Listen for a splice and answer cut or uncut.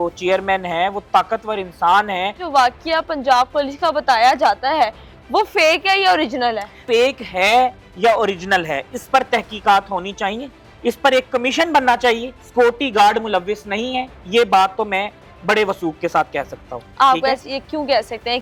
uncut